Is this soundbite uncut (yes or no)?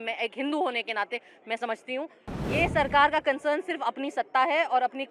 no